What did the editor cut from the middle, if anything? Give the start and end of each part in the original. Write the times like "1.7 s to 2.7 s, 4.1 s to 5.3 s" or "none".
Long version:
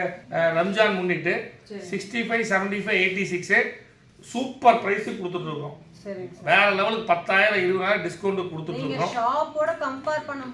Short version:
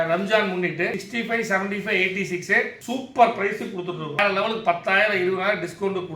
1.5 s to 2.0 s, 3.8 s to 4.2 s, 5.6 s to 6.6 s